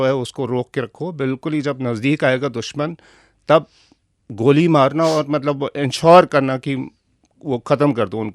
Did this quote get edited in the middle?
no; 0 cuts

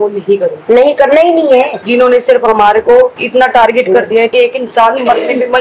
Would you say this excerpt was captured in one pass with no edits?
no; 2 cuts; at 1.8 s, 4.3 s

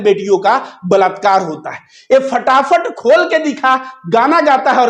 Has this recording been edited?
no; 0 cuts

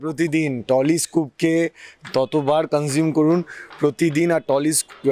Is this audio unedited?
yes; 0 cuts

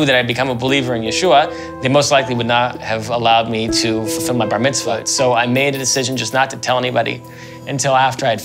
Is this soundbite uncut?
yes; 0 cuts

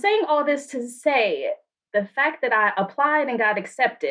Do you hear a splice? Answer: yes; 1 cut; at 1.8 s

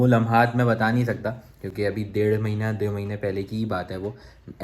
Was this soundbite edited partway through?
no; 0 cuts

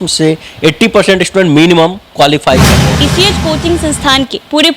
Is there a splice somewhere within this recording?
yes; 1 cut; at 3.0 s

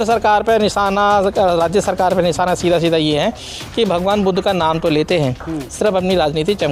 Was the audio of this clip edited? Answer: no; 0 cuts

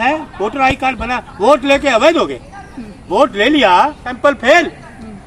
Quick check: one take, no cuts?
no; 1 cut; at 4.1 s

